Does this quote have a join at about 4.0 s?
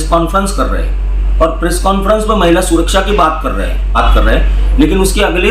yes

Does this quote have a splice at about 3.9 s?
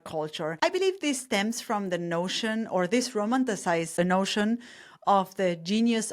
yes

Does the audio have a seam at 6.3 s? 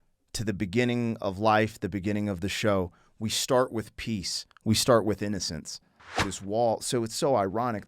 yes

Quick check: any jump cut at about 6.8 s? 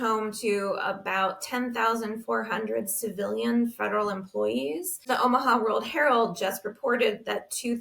no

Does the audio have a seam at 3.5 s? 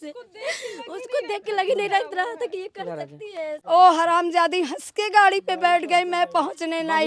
yes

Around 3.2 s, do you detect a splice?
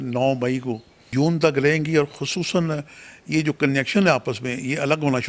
no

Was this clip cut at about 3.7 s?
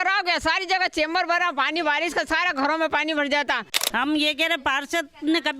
yes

